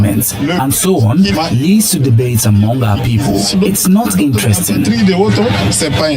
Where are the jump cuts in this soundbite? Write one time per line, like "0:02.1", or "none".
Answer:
0:01.3
0:03.5